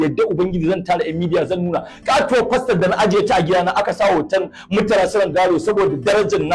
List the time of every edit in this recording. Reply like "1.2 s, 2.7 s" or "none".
none